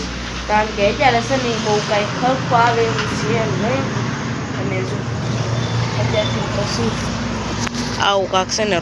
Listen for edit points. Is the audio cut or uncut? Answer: uncut